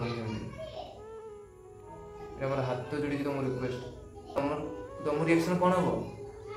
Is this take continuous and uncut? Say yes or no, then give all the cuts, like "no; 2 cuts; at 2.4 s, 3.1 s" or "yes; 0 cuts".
no; 1 cut; at 4.4 s